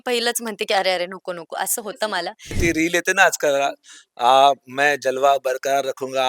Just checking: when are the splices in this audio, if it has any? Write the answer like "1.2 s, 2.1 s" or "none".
2.6 s

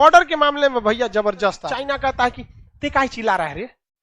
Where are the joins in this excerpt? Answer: 2.0 s

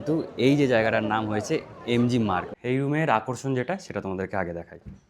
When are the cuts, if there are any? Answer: 2.5 s

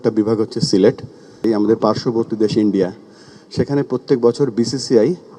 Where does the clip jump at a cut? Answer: 1.5 s

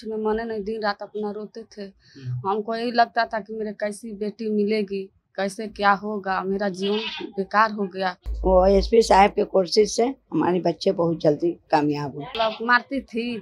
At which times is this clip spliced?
8.3 s, 12.2 s

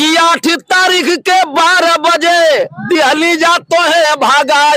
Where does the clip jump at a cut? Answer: none

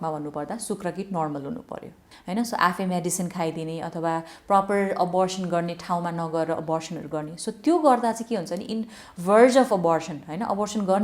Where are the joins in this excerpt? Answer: 2.1 s

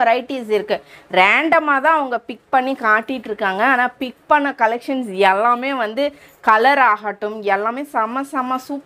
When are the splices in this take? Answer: none

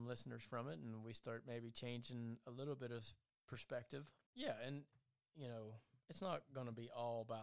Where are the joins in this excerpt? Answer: 4.2 s

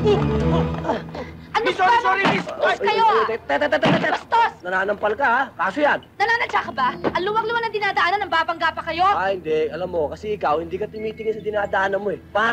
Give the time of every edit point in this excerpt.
none

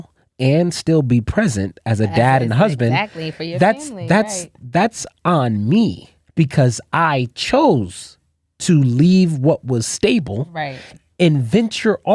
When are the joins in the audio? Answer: none

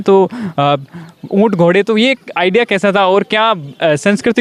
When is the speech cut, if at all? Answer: none

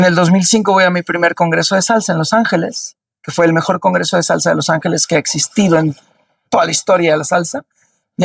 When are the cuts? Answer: none

